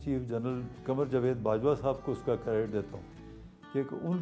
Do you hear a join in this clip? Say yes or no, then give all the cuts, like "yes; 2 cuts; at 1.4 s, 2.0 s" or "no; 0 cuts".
no; 0 cuts